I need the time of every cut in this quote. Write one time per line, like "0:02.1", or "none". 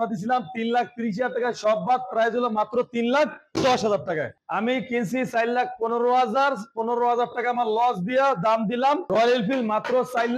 0:04.4